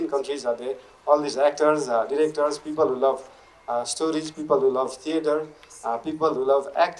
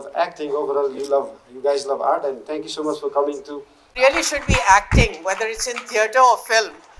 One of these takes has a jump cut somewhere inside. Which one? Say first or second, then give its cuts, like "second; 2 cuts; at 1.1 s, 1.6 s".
second; 1 cut; at 3.9 s